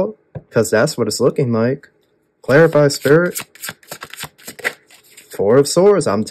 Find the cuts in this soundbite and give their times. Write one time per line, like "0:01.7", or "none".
none